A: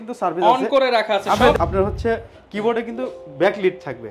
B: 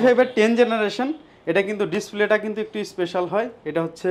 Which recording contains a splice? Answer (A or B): A